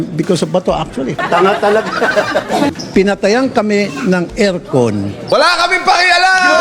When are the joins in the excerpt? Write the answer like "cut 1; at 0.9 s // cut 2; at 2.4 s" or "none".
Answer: cut 1; at 1.2 s // cut 2; at 2.8 s // cut 3; at 5.2 s